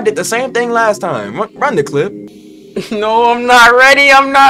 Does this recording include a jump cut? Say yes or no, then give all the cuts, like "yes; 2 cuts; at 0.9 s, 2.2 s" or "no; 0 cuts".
yes; 1 cut; at 2.3 s